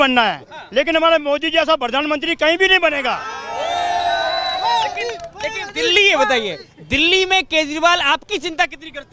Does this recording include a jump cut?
no; 0 cuts

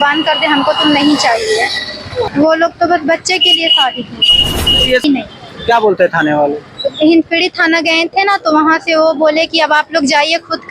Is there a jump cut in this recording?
yes; 2 cuts; at 2.3 s, 5.0 s

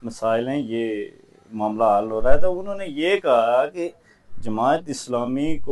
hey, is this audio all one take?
yes; 0 cuts

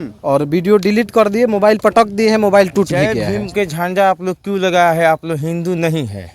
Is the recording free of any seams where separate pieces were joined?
no; 1 cut; at 3.3 s

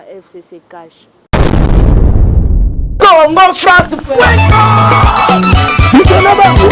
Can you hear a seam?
yes; 1 cut; at 1.2 s

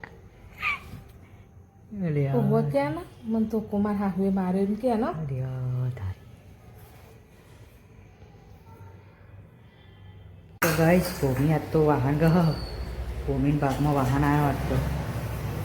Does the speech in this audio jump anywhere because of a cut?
yes; 1 cut; at 10.6 s

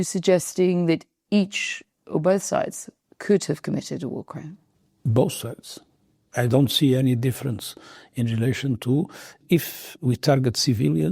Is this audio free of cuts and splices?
no; 1 cut; at 9.3 s

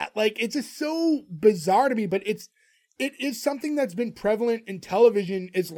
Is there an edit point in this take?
no; 0 cuts

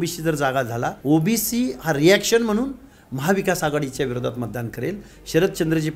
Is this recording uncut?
no; 1 cut; at 1.0 s

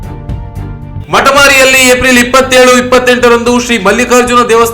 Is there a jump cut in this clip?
yes; 1 cut; at 1.0 s

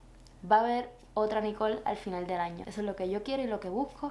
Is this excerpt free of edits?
no; 1 cut; at 2.6 s

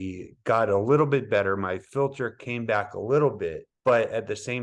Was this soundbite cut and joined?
yes; 1 cut; at 3.7 s

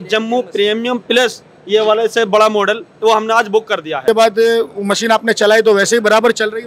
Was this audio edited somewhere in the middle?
yes; 1 cut; at 4.0 s

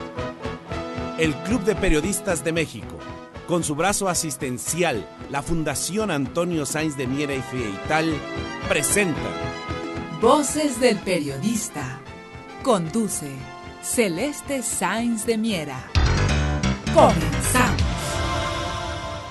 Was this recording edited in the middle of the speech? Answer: no; 0 cuts

